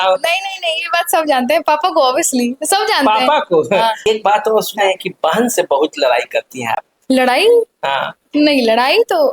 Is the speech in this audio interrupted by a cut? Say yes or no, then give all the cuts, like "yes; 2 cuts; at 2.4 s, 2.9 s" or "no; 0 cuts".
yes; 1 cut; at 4.0 s